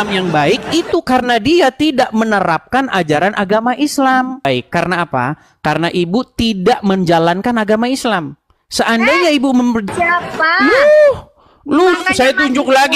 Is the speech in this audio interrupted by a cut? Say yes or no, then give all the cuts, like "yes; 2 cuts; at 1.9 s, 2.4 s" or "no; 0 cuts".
yes; 2 cuts; at 4.4 s, 9.9 s